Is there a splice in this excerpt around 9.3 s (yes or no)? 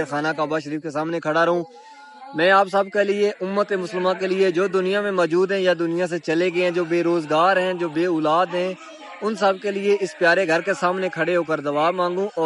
no